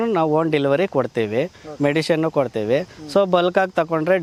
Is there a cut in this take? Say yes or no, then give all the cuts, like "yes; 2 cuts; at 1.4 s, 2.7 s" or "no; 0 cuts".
no; 0 cuts